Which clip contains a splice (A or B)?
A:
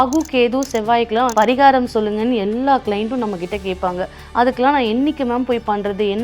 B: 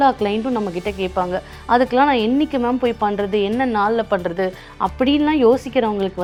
A